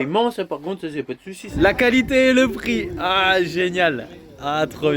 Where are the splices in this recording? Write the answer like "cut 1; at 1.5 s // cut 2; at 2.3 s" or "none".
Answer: cut 1; at 1.5 s